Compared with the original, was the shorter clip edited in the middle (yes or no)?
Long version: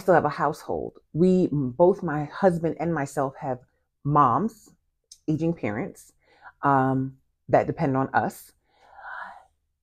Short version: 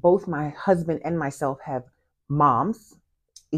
no